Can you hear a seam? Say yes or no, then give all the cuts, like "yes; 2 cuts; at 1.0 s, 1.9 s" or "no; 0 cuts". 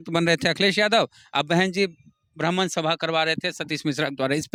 no; 0 cuts